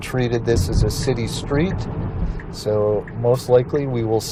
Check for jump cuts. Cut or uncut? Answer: uncut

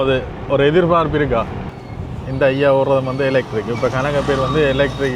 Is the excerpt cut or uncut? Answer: cut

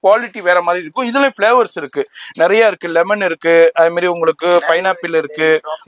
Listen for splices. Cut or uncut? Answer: uncut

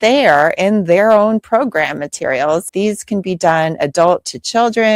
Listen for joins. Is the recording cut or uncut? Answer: cut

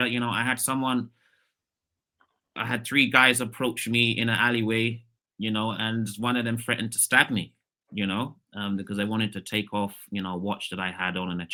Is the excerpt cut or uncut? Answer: uncut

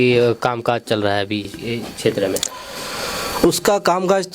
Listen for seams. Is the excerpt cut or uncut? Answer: uncut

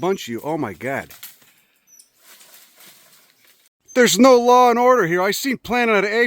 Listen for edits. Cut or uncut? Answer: cut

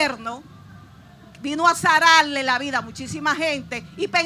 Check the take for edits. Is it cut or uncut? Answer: uncut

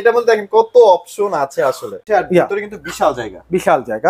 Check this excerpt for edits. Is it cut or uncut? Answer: cut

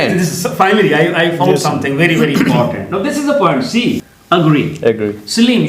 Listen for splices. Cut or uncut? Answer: cut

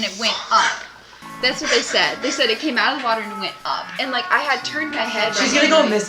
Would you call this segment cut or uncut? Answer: uncut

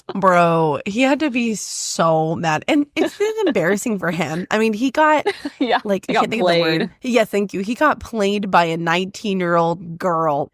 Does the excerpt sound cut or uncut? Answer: cut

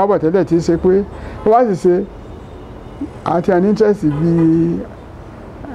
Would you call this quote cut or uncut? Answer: uncut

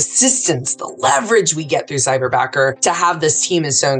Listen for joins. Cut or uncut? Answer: cut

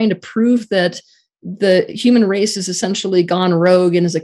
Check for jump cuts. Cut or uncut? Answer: uncut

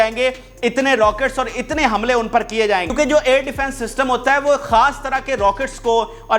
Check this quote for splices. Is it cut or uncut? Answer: uncut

